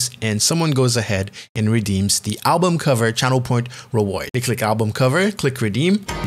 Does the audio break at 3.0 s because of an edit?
no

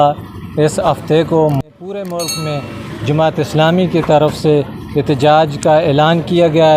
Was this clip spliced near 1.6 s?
yes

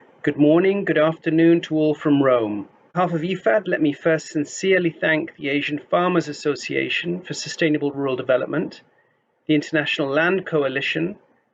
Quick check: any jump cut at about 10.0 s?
no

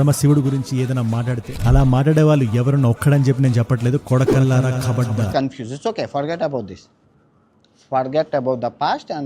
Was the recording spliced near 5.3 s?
yes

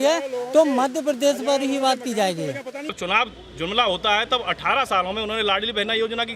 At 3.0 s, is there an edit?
yes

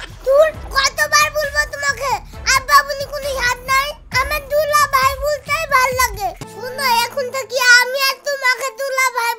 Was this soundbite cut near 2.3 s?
no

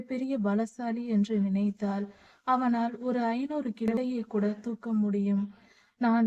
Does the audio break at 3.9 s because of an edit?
yes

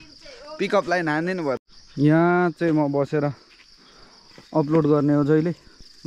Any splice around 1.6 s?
yes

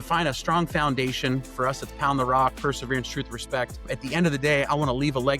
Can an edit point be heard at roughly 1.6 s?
no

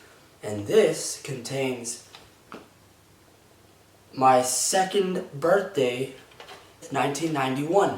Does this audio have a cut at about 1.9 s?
no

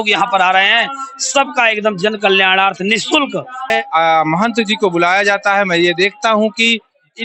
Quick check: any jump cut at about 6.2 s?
no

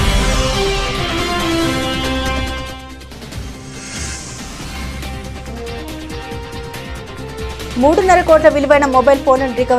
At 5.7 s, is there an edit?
no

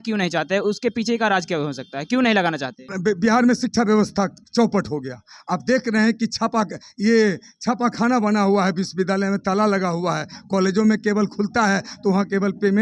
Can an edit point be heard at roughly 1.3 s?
no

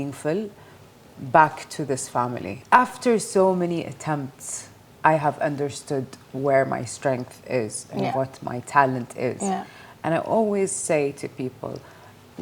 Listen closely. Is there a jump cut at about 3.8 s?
no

